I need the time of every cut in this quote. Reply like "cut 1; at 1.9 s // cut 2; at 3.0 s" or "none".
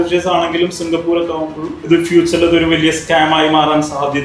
cut 1; at 1.7 s